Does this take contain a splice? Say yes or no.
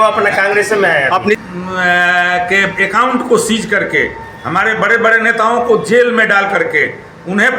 yes